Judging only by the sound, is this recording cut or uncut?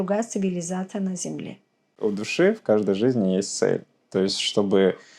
cut